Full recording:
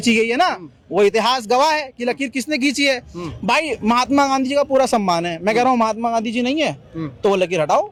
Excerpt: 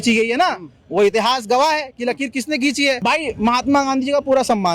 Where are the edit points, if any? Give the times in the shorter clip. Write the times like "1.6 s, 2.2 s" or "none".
3.0 s